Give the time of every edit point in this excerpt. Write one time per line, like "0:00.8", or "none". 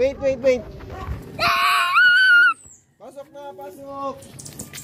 0:01.2